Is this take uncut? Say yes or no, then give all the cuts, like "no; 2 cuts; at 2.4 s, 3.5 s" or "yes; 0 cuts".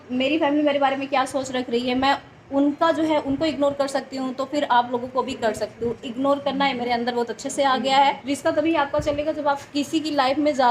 no; 1 cut; at 8.3 s